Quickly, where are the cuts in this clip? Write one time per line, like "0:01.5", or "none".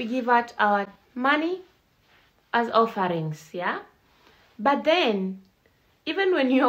none